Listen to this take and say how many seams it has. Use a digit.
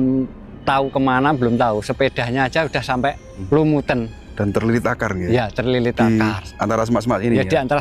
1